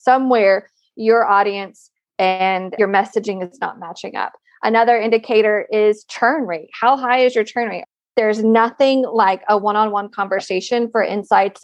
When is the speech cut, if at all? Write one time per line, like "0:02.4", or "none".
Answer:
0:02.7
0:08.0